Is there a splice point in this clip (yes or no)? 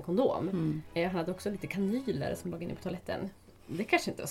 no